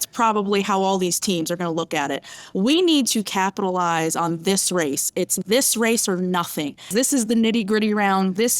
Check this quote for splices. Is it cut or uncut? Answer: cut